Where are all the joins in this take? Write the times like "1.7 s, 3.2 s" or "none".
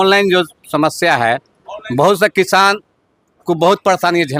none